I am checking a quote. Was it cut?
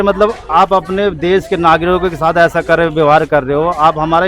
no; 0 cuts

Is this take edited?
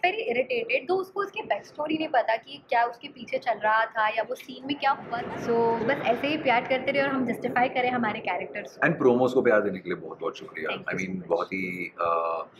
yes; 1 cut; at 5.1 s

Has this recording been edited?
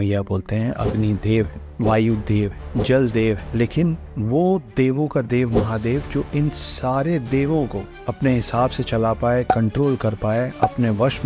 no; 0 cuts

